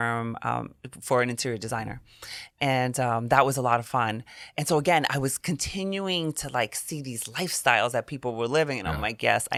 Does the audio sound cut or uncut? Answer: uncut